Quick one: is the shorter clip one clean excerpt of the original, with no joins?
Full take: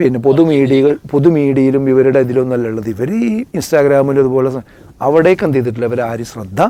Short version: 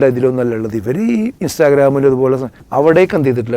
no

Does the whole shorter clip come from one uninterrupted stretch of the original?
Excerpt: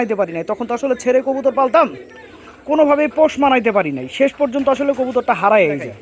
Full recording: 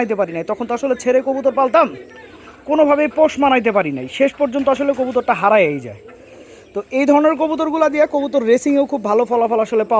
yes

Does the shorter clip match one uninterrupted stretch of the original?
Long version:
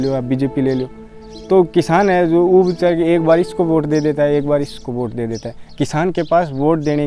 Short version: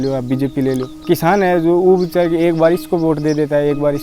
no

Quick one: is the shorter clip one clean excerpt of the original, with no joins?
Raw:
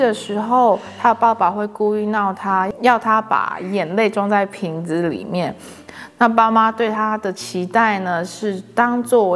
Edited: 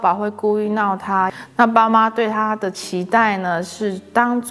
no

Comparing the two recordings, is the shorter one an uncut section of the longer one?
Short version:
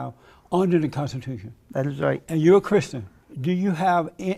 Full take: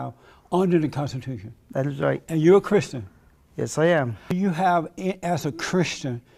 no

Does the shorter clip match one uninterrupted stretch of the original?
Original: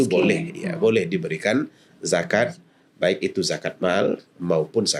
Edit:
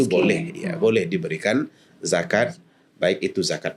yes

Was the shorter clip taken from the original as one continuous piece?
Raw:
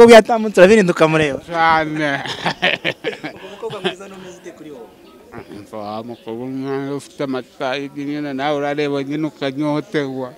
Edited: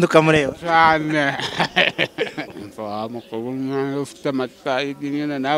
no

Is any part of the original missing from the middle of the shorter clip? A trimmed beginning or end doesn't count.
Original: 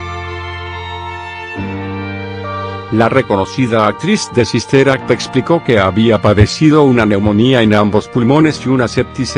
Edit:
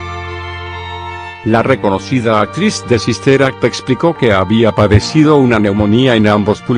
yes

